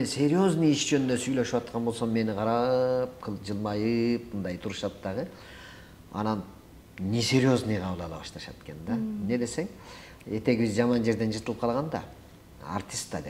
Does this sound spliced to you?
no; 0 cuts

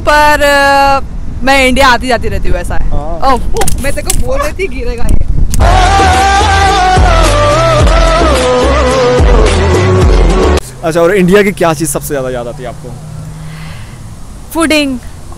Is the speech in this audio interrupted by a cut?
yes; 2 cuts; at 5.6 s, 10.6 s

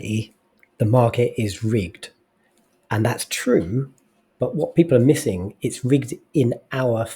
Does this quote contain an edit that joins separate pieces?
no; 0 cuts

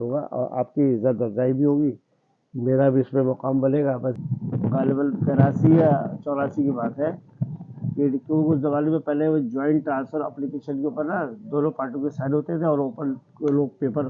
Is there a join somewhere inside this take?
yes; 1 cut; at 4.2 s

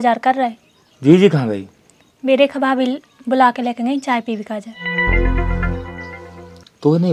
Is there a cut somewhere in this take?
no; 0 cuts

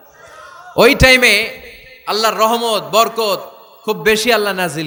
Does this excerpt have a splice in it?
no; 0 cuts

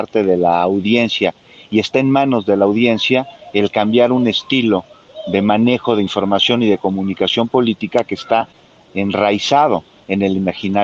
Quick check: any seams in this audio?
no; 0 cuts

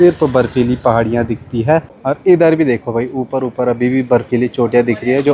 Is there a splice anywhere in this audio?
yes; 1 cut; at 1.9 s

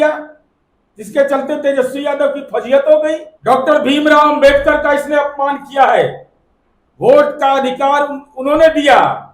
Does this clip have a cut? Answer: yes; 1 cut; at 3.3 s

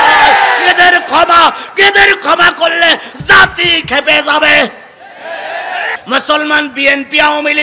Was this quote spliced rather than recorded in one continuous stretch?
yes; 1 cut; at 6.0 s

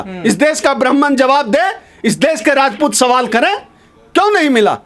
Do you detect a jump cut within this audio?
no; 0 cuts

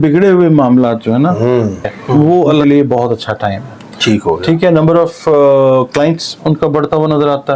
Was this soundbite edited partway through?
yes; 1 cut; at 2.6 s

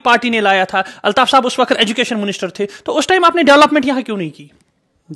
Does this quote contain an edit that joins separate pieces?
no; 0 cuts

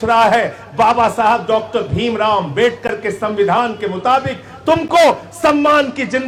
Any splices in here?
no; 0 cuts

